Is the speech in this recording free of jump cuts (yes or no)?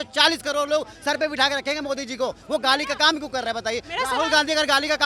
yes